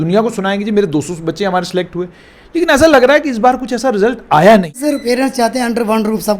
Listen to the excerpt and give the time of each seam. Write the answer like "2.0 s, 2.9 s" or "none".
4.8 s